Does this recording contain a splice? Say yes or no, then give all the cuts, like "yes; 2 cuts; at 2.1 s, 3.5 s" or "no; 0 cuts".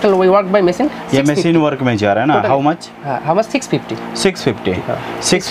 no; 0 cuts